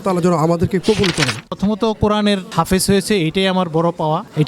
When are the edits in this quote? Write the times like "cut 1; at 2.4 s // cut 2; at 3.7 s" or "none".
cut 1; at 1.4 s